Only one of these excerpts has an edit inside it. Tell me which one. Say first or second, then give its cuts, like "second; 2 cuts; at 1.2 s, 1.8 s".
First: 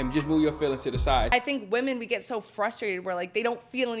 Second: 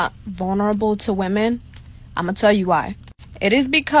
first; 1 cut; at 1.3 s